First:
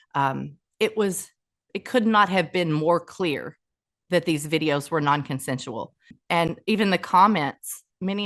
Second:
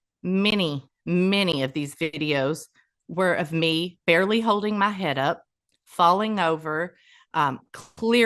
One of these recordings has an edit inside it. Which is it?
first; 1 cut; at 6.1 s

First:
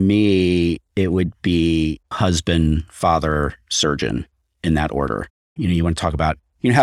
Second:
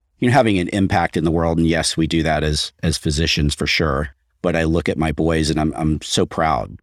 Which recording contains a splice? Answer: first; 2 cuts; at 2.1 s, 5.4 s

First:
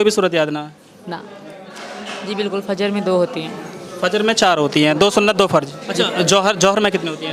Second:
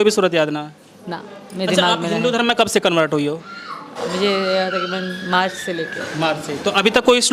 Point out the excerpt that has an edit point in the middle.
first; 2 cuts; at 1.4 s, 5.8 s

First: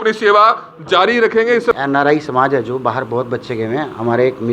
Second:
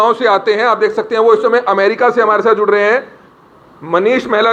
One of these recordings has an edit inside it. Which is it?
first; 1 cut; at 1.7 s

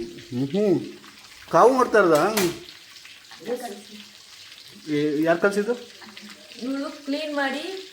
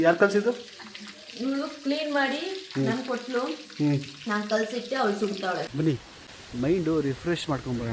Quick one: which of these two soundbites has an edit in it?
second; 1 cut; at 5.7 s

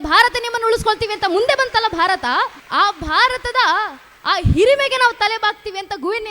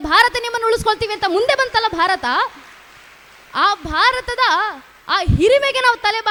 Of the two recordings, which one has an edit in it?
first; 1 cut; at 2.6 s

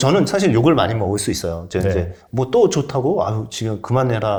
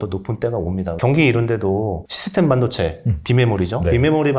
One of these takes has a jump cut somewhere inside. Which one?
second; 2 cuts; at 0.9 s, 2.1 s

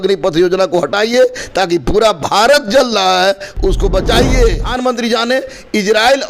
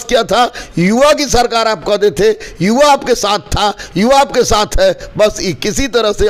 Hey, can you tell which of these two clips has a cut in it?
first; 1 cut; at 4.7 s

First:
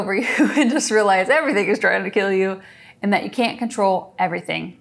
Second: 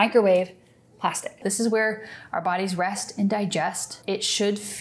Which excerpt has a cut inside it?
second; 2 cuts; at 1.4 s, 3.9 s

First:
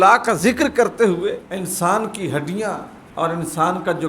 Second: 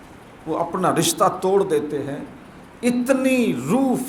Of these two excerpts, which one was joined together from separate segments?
first; 2 cuts; at 1.5 s, 3.0 s

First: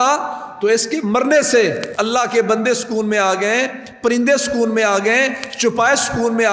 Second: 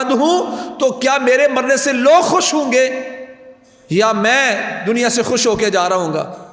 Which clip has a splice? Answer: first; 1 cut; at 1.9 s

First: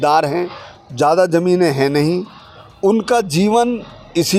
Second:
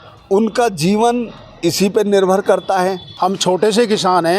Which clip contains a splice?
second; 1 cut; at 3.0 s

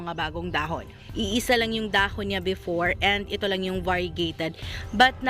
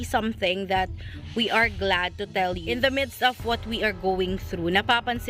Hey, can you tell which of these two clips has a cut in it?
first; 1 cut; at 1.0 s

